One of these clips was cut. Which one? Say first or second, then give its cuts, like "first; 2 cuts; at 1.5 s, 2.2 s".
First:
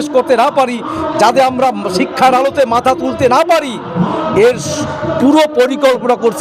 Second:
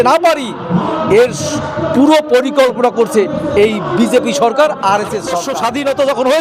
second; 1 cut; at 5.4 s